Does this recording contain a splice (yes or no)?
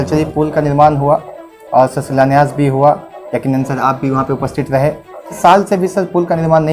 yes